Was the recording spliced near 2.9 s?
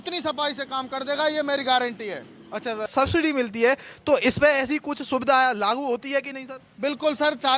yes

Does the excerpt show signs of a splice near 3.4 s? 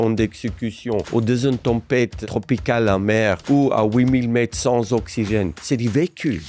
yes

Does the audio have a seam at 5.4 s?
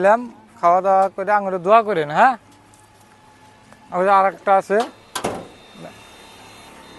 no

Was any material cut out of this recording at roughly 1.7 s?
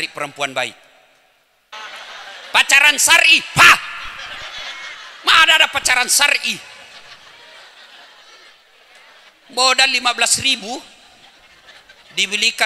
yes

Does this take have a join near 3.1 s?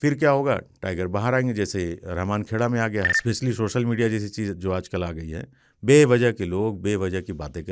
yes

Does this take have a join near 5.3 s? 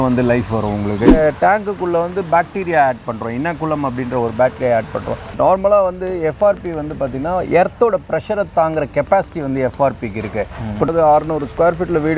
yes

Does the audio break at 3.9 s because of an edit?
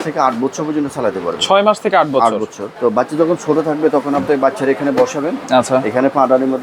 no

